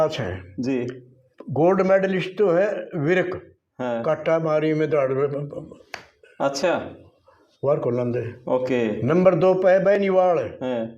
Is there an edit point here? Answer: no; 0 cuts

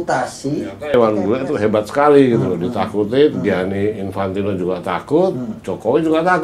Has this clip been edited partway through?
yes; 1 cut; at 0.9 s

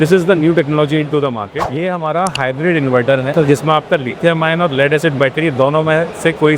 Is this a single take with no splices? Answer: no; 1 cut; at 1.6 s

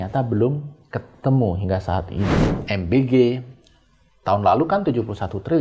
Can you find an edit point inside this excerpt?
yes; 1 cut; at 2.5 s

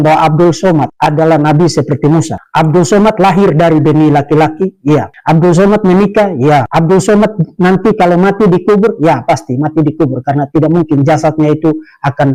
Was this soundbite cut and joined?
no; 0 cuts

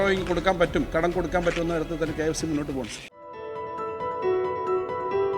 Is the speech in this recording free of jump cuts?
yes; 0 cuts

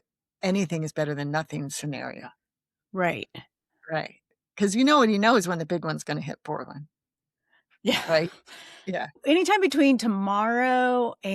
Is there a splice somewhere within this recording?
yes; 1 cut; at 9.2 s

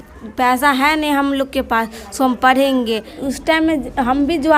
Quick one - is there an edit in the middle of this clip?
yes; 1 cut; at 3.2 s

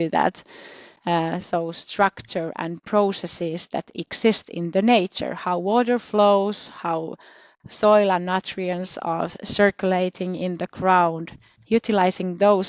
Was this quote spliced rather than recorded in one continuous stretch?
no; 0 cuts

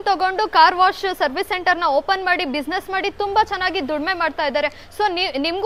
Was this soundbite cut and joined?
no; 0 cuts

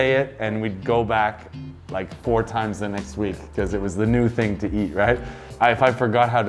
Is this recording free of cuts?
no; 1 cut; at 5.5 s

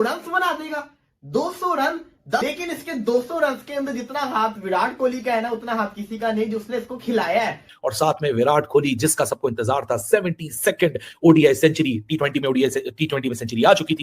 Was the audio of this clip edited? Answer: yes; 2 cuts; at 2.4 s, 7.7 s

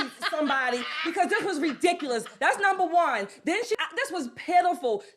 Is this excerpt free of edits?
no; 1 cut; at 3.8 s

